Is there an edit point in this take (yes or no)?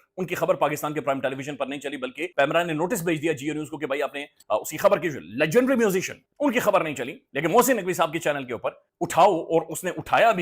yes